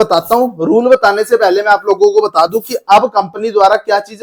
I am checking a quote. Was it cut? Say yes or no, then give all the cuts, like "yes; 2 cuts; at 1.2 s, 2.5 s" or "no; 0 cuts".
no; 0 cuts